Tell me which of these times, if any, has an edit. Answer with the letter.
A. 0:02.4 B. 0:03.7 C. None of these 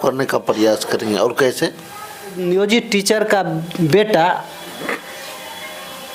A